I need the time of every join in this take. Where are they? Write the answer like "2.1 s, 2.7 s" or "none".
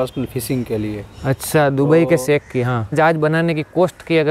2.9 s

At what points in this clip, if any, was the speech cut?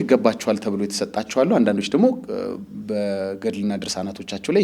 none

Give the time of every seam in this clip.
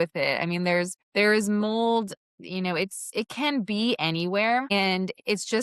1.0 s, 3.0 s, 4.7 s

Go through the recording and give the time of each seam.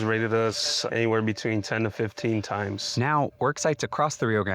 2.8 s

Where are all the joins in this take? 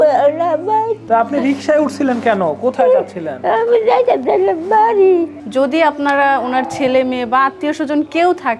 1.0 s, 5.4 s

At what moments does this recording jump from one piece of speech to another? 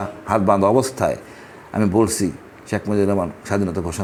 none

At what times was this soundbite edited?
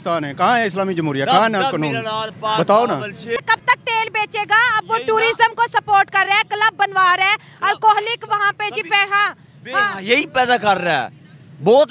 3.4 s

